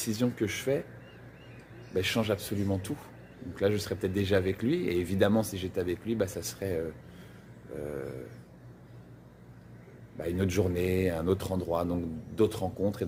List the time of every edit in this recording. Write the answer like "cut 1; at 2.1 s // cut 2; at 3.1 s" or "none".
none